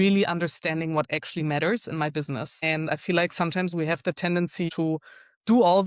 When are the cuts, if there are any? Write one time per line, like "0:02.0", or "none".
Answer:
0:02.5
0:04.7